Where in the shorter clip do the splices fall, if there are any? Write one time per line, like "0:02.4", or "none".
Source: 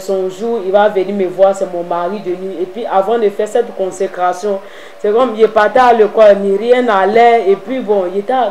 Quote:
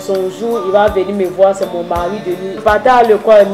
0:02.6